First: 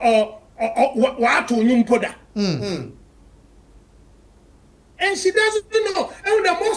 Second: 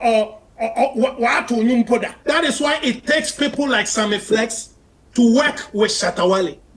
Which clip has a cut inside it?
second; 1 cut; at 2.1 s

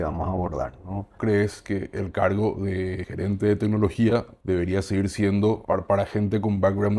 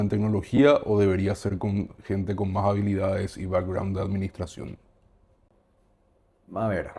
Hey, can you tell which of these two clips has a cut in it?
first; 4 cuts; at 1.1 s, 3.1 s, 4.3 s, 5.6 s

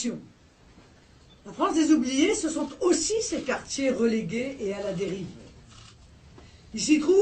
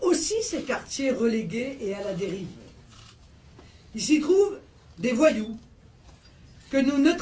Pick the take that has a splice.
first; 1 cut; at 1.8 s

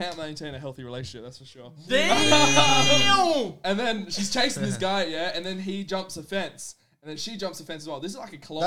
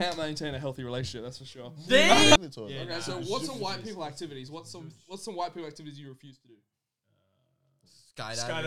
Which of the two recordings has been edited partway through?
second; 1 cut; at 2.4 s

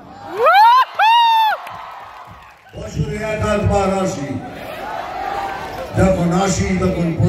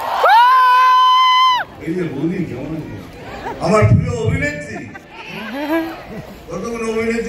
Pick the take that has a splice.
second; 2 cuts; at 1.7 s, 3.2 s

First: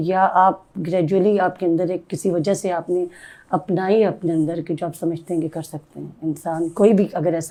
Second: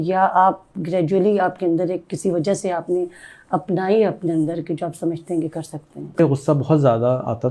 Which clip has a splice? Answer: second; 1 cut; at 6.2 s

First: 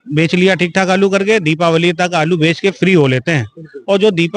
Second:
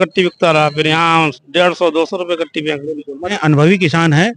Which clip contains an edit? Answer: second; 1 cut; at 3.3 s

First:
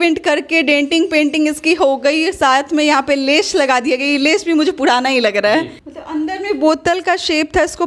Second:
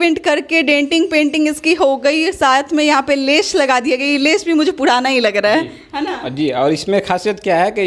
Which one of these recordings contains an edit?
first; 1 cut; at 5.8 s

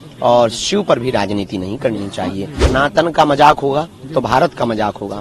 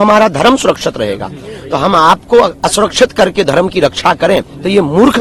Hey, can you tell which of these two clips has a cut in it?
first; 1 cut; at 2.6 s

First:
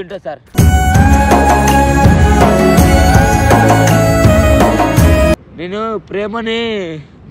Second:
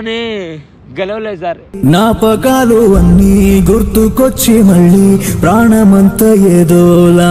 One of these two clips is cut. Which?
first; 1 cut; at 5.3 s

